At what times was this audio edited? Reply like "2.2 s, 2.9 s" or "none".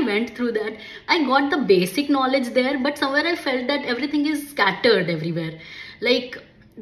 1.0 s